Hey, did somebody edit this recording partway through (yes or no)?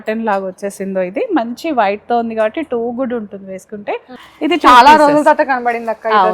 yes